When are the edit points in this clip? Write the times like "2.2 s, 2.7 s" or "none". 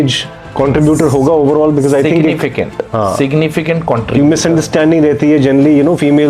none